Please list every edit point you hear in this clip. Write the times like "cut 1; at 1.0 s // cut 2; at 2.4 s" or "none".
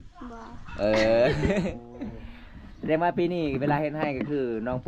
none